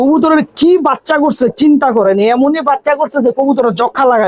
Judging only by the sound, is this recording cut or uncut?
uncut